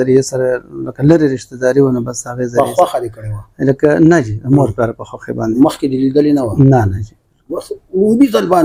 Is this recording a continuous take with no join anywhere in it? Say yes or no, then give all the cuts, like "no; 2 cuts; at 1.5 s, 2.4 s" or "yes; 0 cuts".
yes; 0 cuts